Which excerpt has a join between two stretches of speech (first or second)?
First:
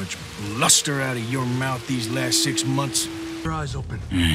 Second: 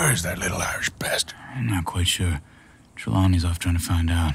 first